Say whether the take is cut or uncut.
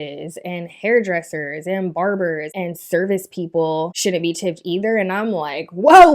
cut